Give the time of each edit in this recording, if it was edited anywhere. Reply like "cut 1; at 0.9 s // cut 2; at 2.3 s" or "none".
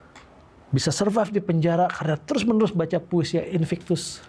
none